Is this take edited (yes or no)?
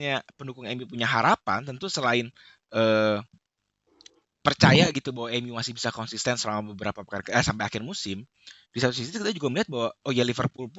no